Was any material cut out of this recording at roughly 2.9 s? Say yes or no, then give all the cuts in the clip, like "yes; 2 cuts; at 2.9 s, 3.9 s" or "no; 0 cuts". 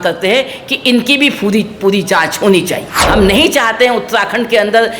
yes; 1 cut; at 2.9 s